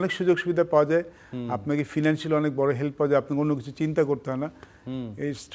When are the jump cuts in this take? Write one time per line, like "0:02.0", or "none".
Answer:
none